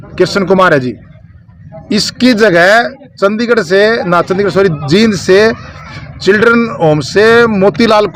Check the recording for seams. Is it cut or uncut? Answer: uncut